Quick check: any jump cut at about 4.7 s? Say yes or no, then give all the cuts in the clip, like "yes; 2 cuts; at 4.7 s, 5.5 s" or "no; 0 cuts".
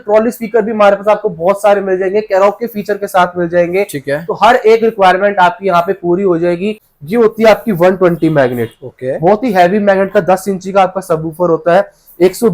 no; 1 cut; at 6.9 s